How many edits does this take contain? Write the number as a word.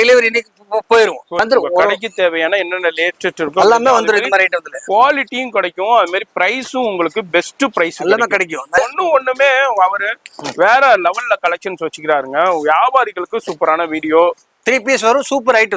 three